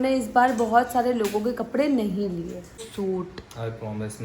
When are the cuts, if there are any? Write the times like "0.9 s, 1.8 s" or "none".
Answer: 2.9 s